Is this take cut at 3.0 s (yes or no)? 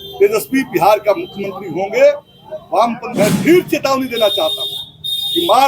yes